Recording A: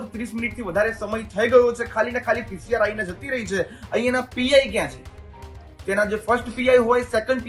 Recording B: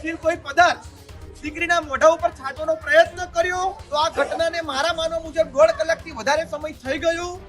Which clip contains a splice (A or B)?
B